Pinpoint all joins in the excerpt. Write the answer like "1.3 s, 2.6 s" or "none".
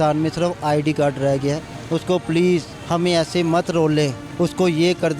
1.7 s, 2.8 s, 4.2 s